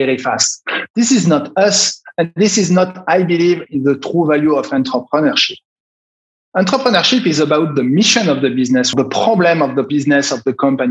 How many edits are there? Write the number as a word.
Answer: two